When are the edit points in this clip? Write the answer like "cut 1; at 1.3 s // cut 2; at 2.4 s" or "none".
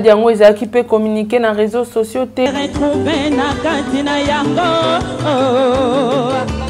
cut 1; at 2.5 s